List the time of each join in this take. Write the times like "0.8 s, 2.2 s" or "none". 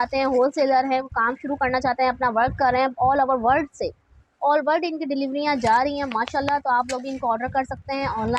none